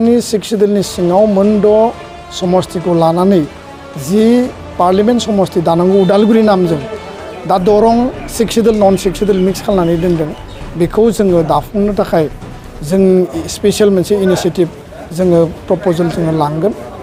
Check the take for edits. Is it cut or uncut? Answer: uncut